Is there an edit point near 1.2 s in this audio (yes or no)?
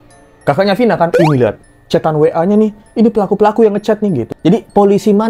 no